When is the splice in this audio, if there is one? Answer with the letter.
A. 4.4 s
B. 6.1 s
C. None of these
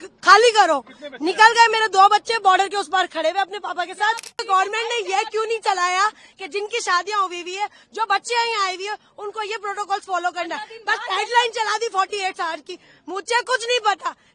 A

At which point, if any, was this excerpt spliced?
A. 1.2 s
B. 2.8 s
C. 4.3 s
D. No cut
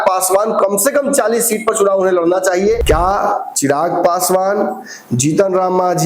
B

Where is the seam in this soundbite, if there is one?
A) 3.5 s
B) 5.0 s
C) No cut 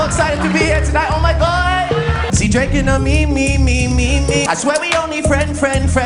C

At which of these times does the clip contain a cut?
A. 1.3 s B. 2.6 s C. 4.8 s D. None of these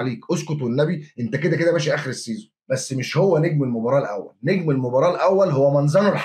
B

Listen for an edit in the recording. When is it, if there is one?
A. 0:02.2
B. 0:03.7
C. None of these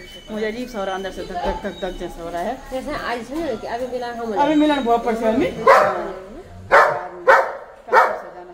C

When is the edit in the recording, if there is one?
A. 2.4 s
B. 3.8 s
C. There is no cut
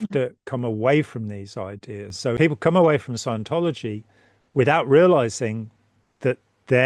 A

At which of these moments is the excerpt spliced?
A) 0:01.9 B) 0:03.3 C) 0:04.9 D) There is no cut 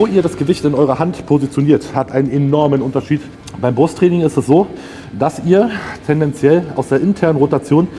B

